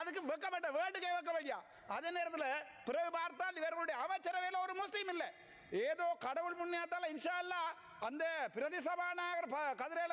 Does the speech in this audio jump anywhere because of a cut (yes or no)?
no